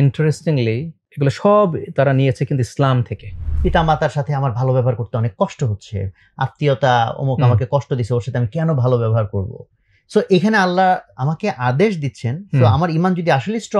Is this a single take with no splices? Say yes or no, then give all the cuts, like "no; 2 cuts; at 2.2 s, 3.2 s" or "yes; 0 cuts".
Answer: no; 2 cuts; at 1.0 s, 3.5 s